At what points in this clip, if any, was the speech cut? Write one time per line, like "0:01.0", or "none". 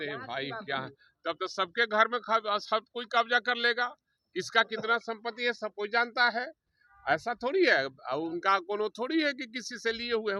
none